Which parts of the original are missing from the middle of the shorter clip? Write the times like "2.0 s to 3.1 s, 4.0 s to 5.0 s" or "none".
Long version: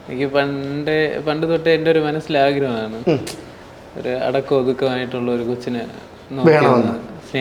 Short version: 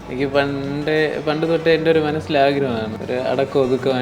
2.9 s to 3.9 s

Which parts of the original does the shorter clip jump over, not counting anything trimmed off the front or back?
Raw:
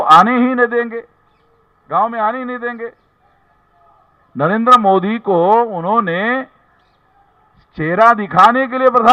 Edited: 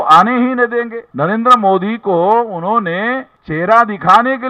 1.0 s to 4.2 s, 6.6 s to 7.7 s

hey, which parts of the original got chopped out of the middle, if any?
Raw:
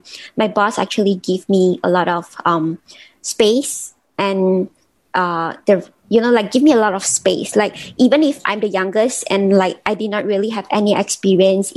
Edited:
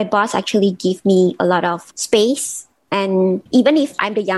2.3 s to 3.1 s, 4.7 s to 7.9 s

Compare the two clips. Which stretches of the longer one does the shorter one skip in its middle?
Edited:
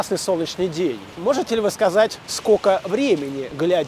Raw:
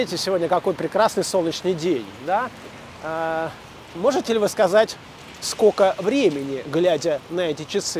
2.1 s to 3.8 s, 5.0 s to 5.4 s

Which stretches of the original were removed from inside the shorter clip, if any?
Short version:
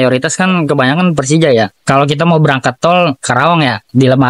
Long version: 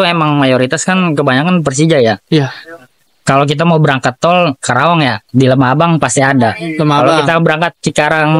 2.2 s to 3.1 s

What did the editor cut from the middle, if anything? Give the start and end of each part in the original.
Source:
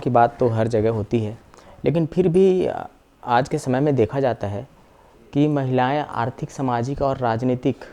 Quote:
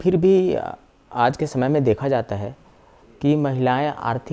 none

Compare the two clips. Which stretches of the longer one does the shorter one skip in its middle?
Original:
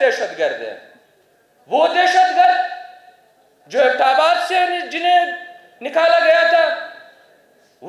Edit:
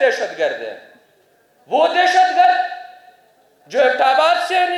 none

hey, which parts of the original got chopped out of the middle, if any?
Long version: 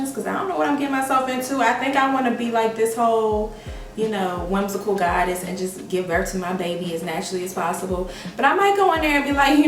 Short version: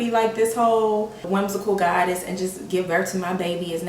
3.6 s to 4.4 s

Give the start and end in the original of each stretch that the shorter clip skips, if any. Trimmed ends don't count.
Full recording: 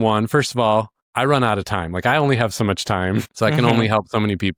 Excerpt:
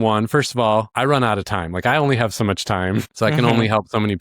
0.9 s to 1.1 s

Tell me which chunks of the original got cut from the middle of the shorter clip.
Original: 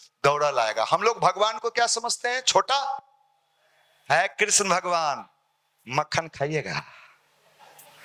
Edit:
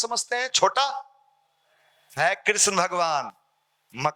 none

